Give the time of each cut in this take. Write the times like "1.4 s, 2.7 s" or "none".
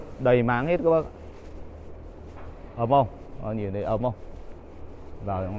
none